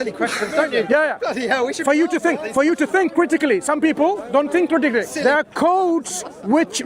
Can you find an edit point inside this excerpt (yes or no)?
yes